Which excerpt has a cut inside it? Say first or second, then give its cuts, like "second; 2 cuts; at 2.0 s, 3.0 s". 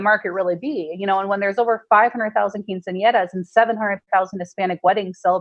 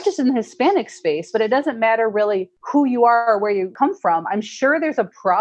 second; 2 cuts; at 2.5 s, 3.7 s